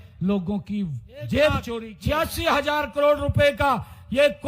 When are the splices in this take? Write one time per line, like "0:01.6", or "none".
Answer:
0:01.8